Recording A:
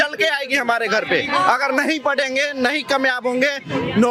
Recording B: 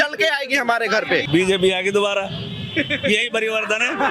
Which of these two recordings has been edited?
B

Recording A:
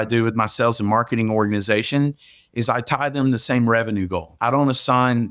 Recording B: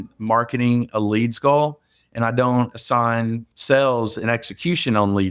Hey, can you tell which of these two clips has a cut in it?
A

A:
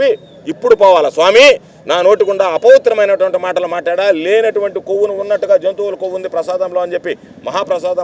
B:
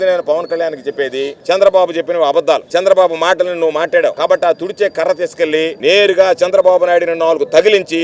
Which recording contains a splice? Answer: B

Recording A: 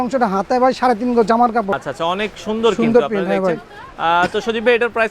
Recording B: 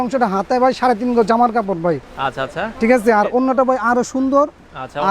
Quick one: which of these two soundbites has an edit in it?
A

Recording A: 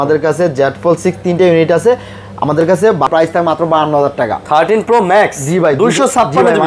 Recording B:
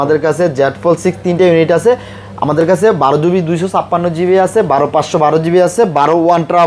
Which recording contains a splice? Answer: A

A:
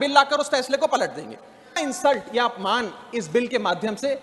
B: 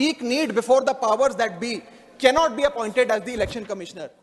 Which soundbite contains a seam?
A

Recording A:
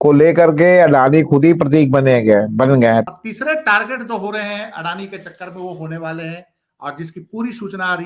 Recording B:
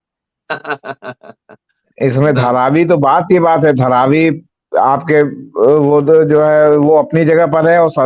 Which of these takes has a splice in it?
A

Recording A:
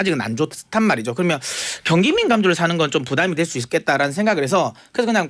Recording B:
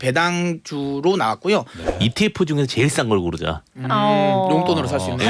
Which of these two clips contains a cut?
B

